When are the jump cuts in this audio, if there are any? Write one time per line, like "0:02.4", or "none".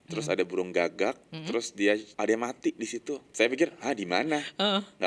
0:02.1
0:03.3